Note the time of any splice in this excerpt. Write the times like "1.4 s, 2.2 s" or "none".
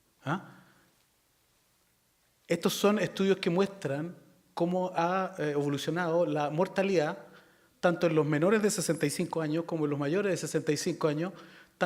none